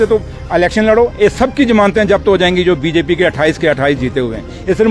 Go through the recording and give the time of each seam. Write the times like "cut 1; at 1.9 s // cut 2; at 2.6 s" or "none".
none